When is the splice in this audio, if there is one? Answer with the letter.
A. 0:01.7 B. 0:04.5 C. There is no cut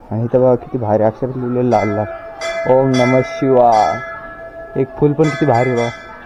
C